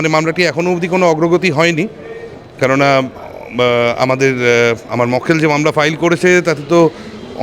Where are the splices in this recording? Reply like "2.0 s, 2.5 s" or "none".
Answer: none

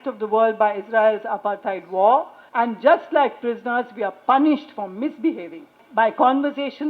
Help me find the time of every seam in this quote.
2.4 s, 5.8 s

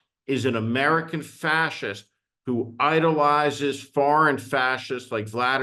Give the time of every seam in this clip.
none

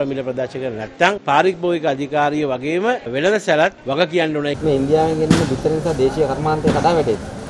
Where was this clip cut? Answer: 1.2 s, 4.2 s

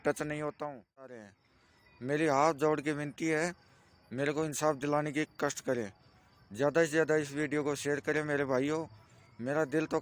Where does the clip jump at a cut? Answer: 1.3 s

